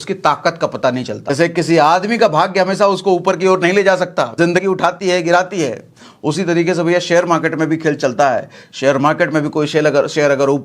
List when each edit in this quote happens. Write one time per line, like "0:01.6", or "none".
0:01.3
0:04.6